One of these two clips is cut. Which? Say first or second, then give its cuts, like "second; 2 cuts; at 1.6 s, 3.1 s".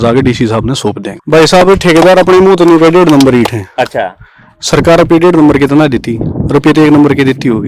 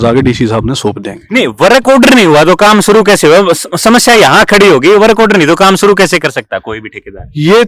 first; 1 cut; at 1.1 s